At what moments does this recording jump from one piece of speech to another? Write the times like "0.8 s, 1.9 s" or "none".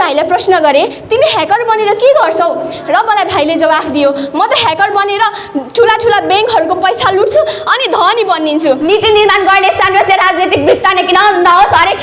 8.8 s